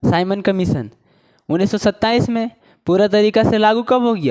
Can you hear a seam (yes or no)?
no